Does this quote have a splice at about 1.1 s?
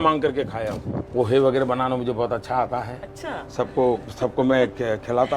yes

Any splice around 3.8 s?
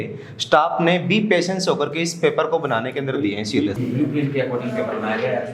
yes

